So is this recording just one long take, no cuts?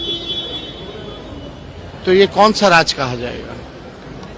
yes; 0 cuts

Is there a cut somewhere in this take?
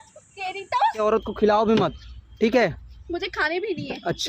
yes; 1 cut; at 1.0 s

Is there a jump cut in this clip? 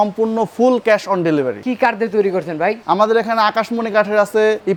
no; 0 cuts

